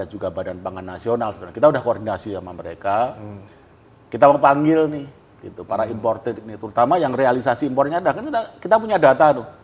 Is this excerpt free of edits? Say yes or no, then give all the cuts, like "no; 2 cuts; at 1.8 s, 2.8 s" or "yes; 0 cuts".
yes; 0 cuts